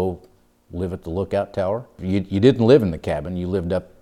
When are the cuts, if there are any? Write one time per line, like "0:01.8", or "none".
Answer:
0:02.0